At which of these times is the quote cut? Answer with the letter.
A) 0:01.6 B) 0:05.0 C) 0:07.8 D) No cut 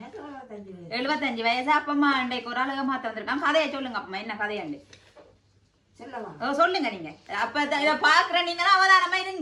D